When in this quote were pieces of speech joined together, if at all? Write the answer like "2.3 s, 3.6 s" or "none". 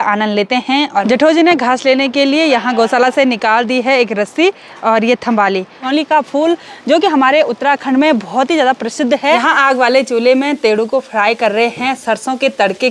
1.0 s, 5.8 s, 9.4 s

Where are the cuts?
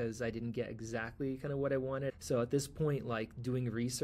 2.1 s

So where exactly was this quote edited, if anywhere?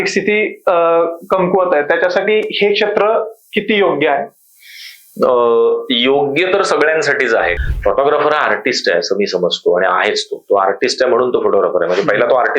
7.6 s

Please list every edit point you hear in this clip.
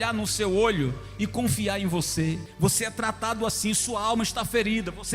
2.5 s

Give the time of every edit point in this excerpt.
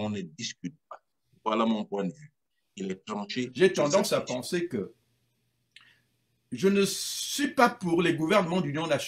3.5 s

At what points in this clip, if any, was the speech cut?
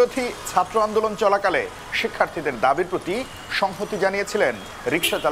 none

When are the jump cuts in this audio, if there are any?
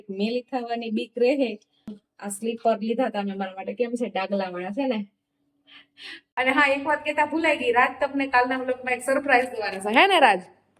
2.0 s, 6.2 s

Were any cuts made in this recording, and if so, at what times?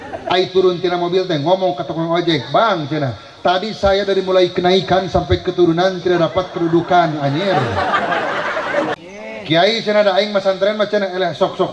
9.0 s

